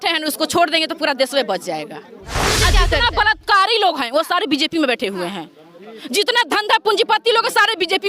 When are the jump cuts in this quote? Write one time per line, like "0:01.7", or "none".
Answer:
0:02.5